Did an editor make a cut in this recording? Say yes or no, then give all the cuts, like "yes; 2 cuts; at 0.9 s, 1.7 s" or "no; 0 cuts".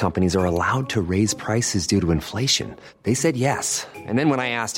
no; 0 cuts